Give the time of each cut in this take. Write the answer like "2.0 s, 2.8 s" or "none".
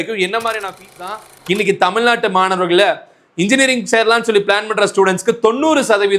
1.1 s